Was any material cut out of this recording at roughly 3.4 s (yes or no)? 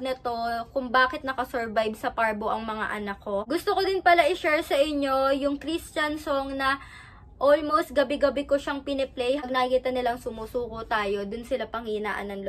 yes